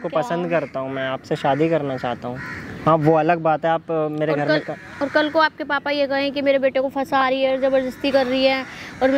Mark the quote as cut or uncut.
uncut